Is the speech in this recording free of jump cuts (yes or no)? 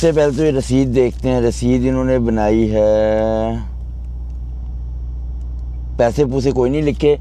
yes